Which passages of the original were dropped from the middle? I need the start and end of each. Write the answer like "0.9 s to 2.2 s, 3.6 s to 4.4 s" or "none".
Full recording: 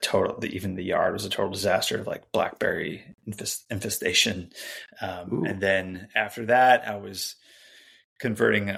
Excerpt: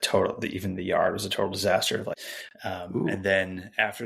2.2 s to 4.6 s